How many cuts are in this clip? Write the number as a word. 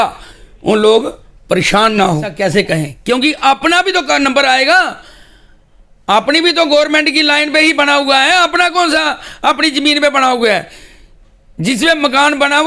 one